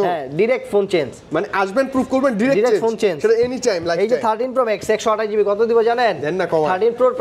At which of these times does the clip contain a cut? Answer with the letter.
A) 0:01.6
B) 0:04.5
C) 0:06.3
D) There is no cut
D